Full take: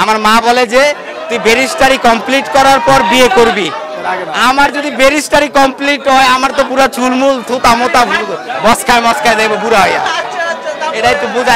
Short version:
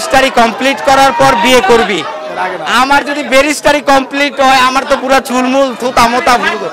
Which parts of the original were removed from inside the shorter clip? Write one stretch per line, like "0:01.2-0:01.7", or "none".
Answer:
none

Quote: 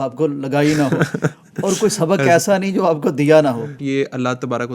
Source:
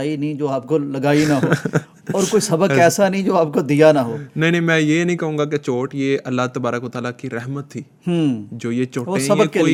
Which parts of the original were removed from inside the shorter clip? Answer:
0:04.3-0:05.9

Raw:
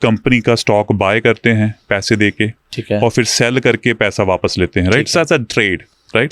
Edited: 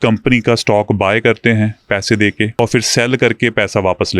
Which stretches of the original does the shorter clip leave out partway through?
0:02.6-0:03.0

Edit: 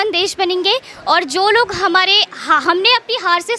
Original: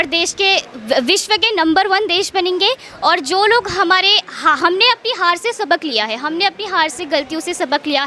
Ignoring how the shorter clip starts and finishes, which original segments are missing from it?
none

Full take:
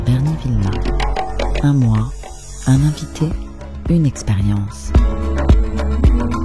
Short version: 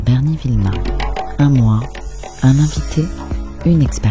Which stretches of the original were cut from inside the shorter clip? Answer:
0:01.3-0:01.6

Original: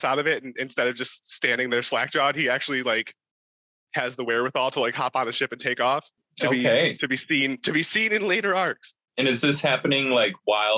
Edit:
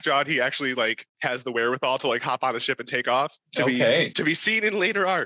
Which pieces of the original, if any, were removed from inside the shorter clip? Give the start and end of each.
0:03.1-0:03.8
0:06.1-0:06.3
0:07.0-0:07.6

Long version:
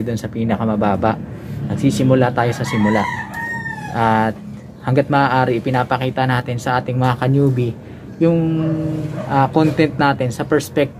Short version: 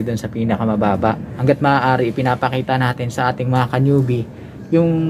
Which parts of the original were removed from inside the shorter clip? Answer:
0:01.3-0:04.8

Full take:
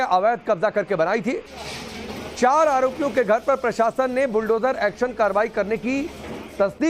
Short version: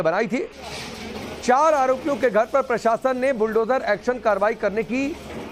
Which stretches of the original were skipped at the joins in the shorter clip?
none

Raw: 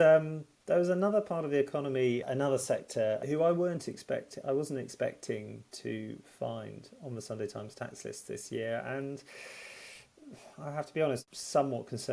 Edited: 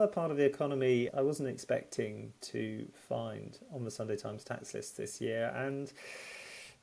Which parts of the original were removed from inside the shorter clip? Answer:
0:02.2-0:04.4

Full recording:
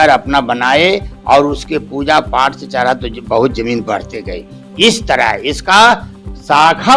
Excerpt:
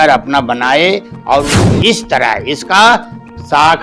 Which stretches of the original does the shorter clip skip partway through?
0:01.6-0:04.6

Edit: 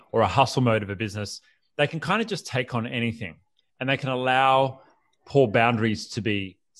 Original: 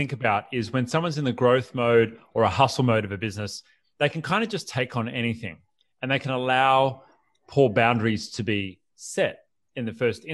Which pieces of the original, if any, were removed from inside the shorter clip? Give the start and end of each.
none

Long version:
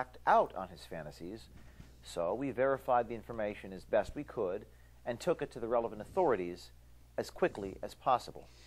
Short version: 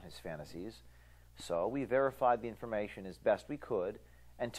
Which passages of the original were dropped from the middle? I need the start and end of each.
none

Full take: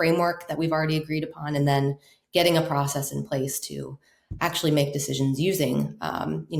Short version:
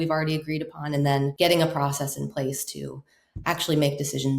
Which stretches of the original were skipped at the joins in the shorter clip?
0:01.9-0:02.3

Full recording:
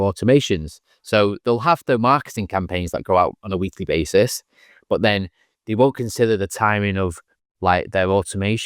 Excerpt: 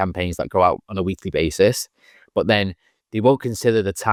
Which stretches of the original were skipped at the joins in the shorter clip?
none

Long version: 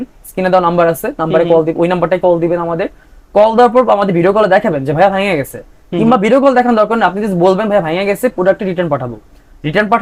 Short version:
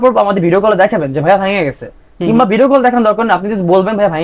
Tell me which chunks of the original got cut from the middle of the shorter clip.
none

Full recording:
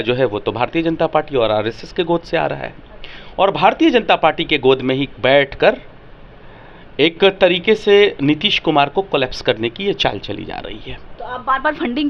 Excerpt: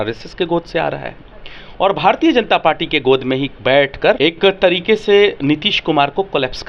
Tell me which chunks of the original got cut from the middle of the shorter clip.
0:05.8-0:07.0

